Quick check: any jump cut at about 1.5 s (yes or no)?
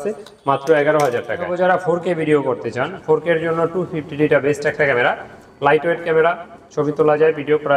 yes